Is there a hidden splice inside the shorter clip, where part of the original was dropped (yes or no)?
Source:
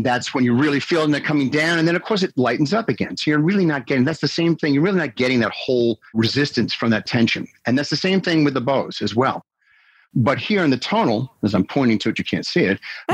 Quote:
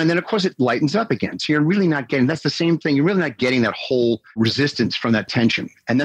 no